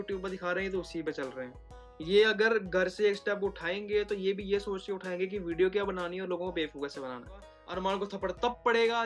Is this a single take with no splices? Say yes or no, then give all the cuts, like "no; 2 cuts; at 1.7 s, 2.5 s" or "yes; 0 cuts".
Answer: no; 1 cut; at 7.5 s